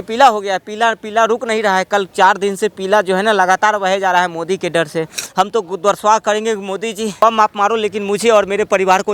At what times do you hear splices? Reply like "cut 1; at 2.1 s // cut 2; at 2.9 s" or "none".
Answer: cut 1; at 5.2 s // cut 2; at 7.2 s